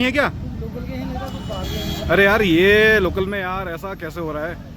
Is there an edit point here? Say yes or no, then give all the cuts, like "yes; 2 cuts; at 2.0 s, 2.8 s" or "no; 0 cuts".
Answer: no; 0 cuts